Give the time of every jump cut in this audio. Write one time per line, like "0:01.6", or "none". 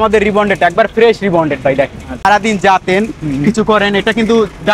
0:02.2